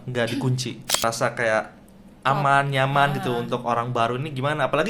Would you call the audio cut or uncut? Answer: cut